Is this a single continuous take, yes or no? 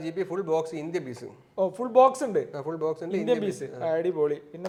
yes